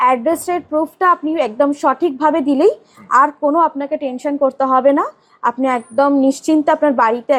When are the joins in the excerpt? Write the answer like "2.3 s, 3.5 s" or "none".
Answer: none

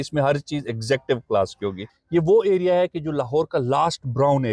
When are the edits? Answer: 1.9 s

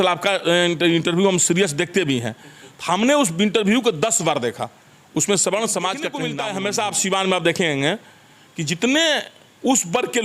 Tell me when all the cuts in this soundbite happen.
6.3 s

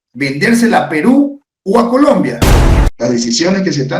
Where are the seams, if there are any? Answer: 2.5 s

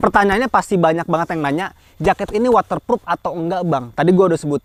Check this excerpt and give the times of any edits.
none

